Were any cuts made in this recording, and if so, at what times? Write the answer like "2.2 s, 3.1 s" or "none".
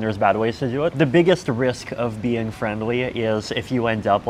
0.9 s